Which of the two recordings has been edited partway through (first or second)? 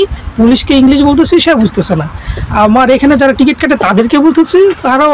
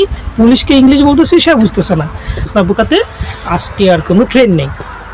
second